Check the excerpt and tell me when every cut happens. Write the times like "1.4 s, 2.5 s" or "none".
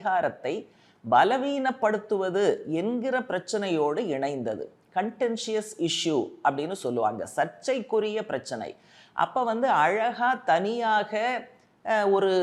none